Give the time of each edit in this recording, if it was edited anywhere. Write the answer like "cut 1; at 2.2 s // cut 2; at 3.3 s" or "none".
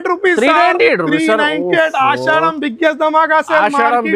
none